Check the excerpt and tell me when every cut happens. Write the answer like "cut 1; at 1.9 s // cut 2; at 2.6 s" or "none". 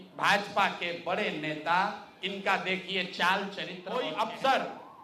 cut 1; at 3.8 s